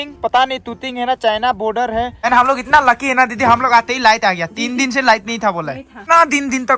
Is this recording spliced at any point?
yes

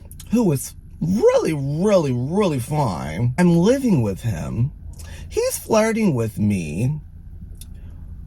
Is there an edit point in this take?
yes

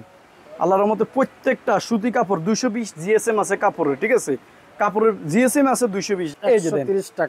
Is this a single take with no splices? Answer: no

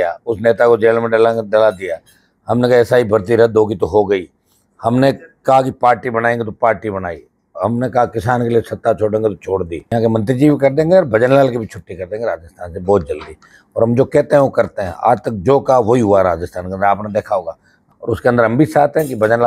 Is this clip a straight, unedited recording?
no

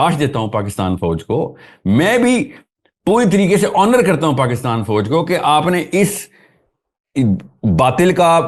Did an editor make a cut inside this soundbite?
no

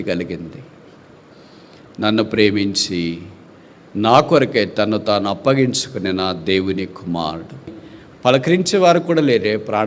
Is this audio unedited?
no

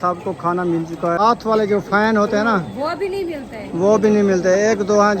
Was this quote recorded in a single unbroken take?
no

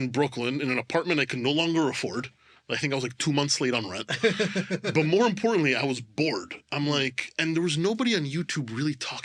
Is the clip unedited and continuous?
yes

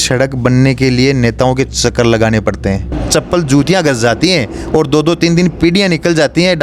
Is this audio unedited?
no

